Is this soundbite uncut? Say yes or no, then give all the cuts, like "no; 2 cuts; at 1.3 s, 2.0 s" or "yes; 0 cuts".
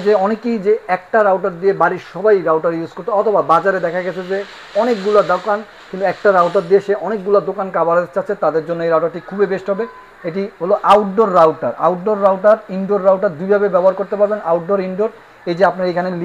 yes; 0 cuts